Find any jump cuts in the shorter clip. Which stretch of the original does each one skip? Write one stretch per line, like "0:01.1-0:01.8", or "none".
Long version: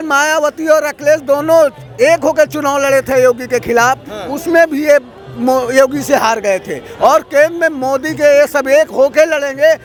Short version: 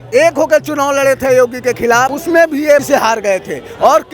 0:04.0-0:04.4
0:05.0-0:06.0